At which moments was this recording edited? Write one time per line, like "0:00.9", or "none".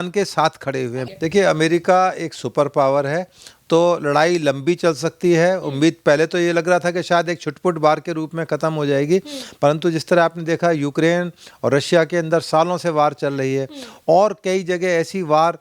0:01.0

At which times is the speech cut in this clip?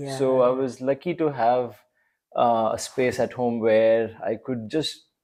none

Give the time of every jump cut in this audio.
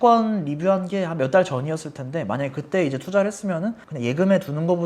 0:03.9

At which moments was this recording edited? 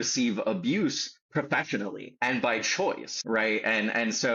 0:02.1
0:03.1

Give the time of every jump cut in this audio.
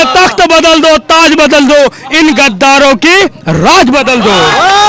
none

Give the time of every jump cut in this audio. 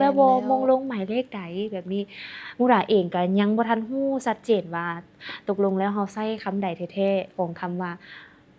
none

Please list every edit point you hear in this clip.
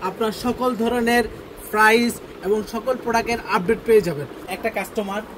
0:04.4

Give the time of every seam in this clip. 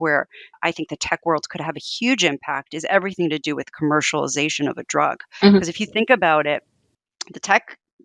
none

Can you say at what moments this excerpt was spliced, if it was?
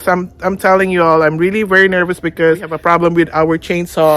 0:02.7

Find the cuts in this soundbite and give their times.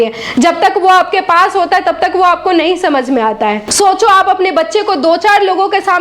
0:03.7

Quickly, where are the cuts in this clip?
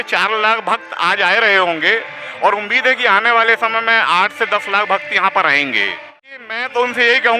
0:06.4

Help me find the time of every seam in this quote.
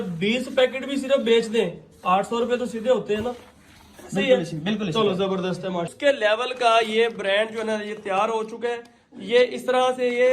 0:05.9

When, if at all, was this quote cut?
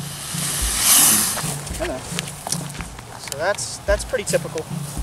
none

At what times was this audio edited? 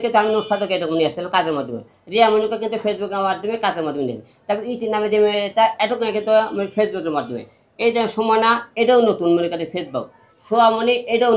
none

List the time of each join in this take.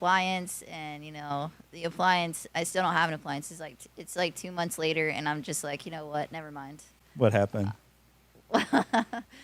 none

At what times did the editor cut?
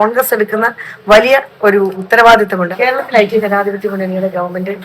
0:02.0
0:02.7

